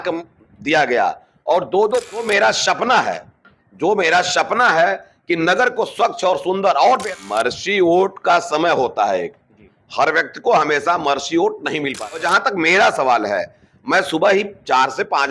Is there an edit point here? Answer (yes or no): yes